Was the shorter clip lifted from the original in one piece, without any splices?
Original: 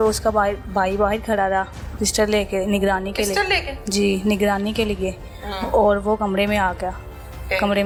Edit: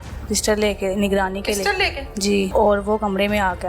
no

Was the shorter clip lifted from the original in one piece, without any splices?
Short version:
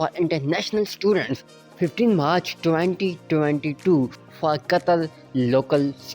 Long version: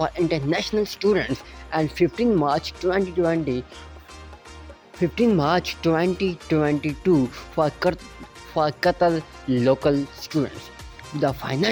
no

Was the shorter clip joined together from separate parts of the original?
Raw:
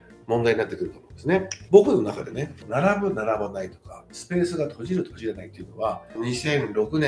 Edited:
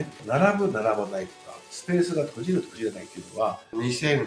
no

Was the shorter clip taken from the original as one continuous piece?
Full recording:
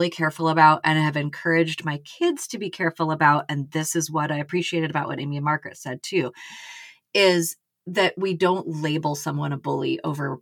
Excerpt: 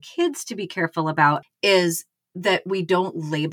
no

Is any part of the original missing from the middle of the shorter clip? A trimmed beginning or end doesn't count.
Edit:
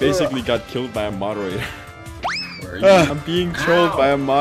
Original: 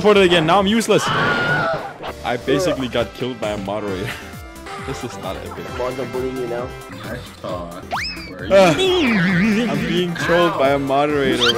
yes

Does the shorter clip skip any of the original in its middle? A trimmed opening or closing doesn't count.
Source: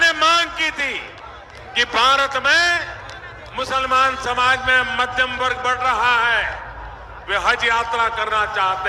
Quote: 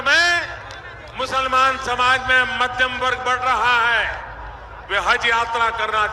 no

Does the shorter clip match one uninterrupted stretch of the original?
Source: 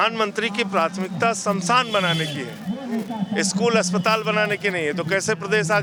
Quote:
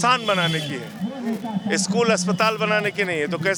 yes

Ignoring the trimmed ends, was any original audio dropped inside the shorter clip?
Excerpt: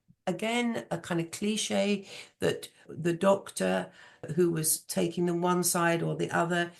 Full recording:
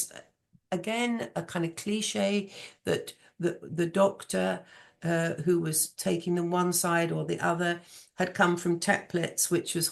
yes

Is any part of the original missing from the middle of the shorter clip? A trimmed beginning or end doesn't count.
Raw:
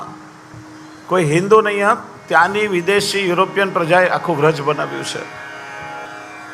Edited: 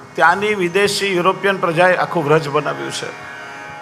no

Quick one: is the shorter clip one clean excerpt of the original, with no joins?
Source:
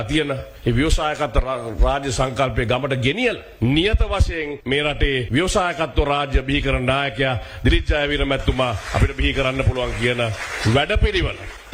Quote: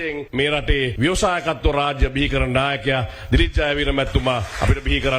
yes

